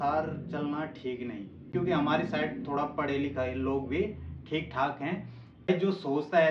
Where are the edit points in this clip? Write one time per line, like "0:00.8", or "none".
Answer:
0:01.7
0:05.7